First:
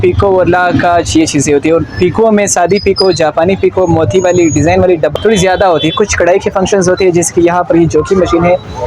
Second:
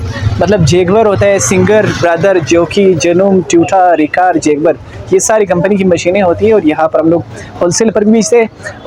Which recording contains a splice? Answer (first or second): first